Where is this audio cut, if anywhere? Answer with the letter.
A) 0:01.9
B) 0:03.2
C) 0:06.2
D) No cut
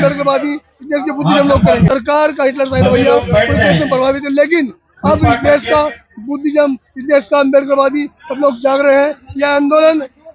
A